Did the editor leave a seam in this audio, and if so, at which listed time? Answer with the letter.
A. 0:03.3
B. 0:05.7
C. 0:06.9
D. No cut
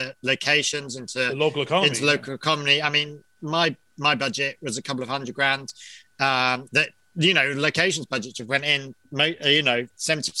D